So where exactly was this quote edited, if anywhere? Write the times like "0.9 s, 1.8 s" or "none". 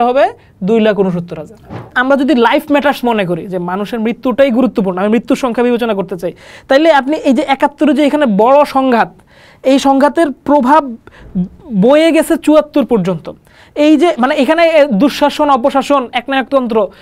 1.9 s

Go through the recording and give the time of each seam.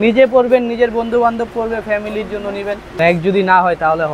3.0 s

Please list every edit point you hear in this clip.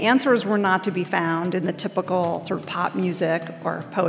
none

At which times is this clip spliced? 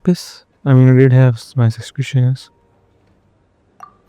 2.4 s

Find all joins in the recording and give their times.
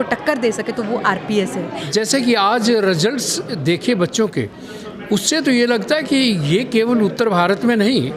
1.9 s

